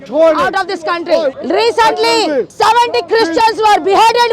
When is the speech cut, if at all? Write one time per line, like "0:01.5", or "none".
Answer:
0:01.4
0:02.5